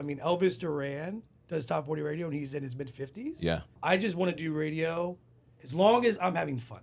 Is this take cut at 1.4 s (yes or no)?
no